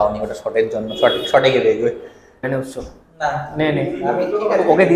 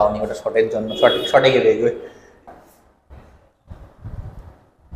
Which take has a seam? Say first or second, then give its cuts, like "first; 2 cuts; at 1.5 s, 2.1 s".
first; 1 cut; at 2.4 s